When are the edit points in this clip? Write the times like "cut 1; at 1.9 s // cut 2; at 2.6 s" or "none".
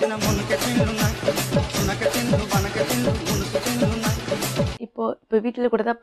cut 1; at 4.7 s